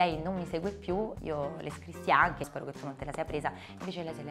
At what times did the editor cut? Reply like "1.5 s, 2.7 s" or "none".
1.2 s, 2.5 s

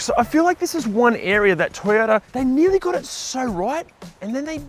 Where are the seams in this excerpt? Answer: 2.3 s

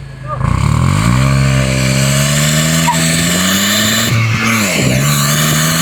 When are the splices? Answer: none

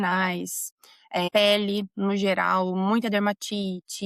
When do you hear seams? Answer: none

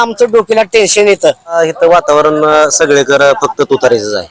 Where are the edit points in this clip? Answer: 1.6 s

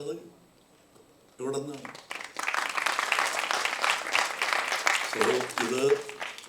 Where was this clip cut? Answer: none

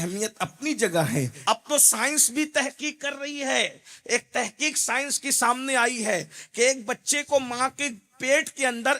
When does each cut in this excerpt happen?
1.3 s

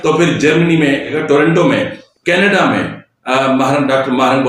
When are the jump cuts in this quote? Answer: 1.1 s, 2.0 s

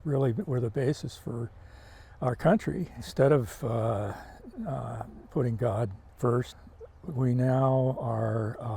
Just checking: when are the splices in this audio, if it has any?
3.0 s, 6.0 s, 6.6 s

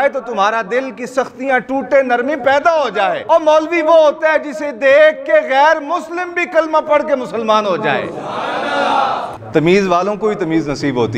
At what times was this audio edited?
3.2 s, 9.4 s

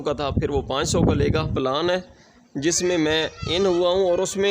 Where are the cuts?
1.5 s

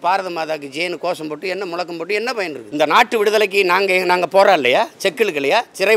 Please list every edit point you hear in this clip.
2.6 s

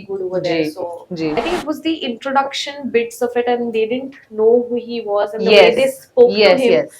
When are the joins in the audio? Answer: 1.3 s

